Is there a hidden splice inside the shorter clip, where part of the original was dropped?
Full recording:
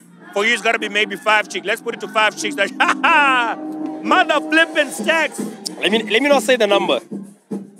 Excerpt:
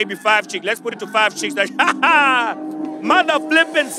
no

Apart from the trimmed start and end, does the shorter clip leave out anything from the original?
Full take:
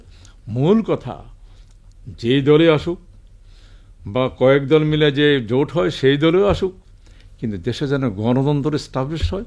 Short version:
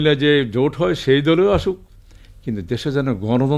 no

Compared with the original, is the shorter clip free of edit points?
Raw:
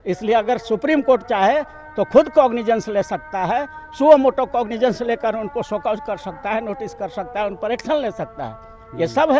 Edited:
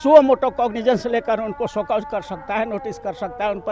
yes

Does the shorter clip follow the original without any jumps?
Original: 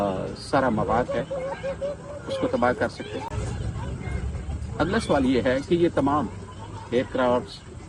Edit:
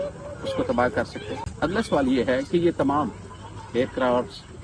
no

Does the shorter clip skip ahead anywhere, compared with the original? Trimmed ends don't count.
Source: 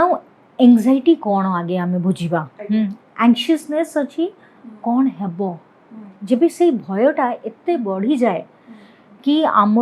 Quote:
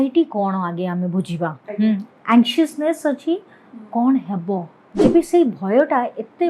yes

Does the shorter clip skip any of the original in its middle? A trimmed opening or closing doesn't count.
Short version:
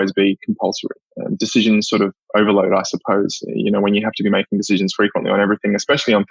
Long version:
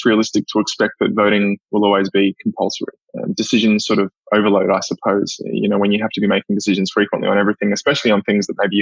no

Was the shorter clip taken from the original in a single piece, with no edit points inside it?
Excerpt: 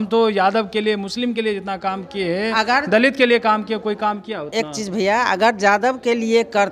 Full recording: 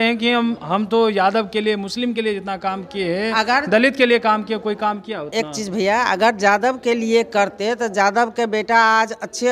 yes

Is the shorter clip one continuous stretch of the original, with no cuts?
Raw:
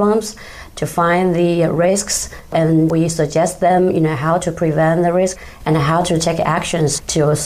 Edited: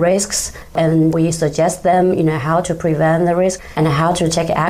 no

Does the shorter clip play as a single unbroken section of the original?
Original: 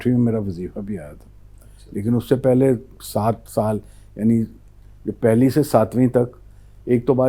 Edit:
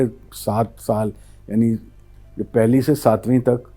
yes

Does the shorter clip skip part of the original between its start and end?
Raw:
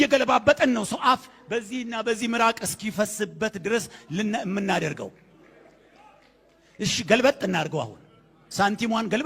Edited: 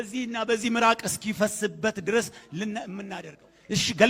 yes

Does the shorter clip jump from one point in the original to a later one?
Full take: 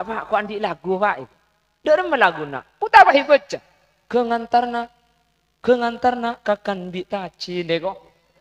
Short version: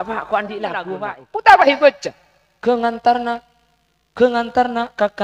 yes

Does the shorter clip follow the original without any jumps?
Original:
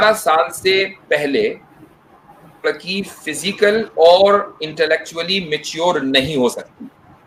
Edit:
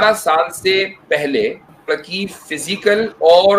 no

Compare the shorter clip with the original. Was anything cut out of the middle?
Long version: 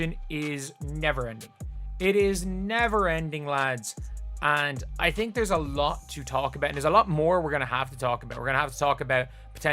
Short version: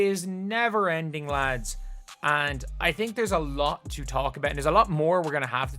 no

